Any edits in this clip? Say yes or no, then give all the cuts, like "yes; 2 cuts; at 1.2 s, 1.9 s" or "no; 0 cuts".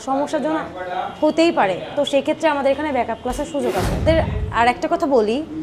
yes; 1 cut; at 4.0 s